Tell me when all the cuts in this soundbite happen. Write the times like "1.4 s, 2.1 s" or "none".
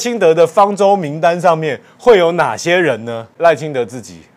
3.3 s